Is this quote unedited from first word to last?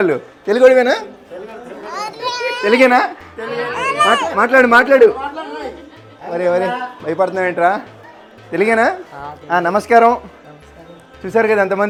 yes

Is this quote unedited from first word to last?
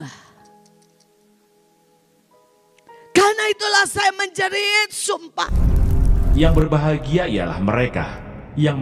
no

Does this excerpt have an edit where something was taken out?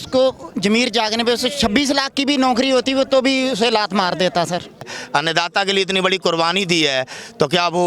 yes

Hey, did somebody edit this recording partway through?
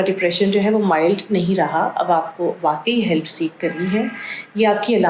no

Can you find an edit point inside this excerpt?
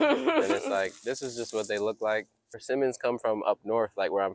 yes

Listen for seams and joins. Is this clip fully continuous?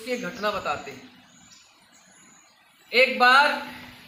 yes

